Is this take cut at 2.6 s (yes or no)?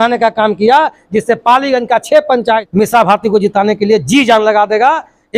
yes